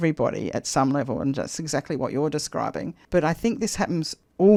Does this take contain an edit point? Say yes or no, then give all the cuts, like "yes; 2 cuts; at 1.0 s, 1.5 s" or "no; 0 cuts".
no; 0 cuts